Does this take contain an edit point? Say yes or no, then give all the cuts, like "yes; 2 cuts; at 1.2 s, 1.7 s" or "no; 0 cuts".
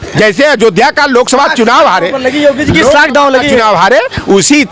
no; 0 cuts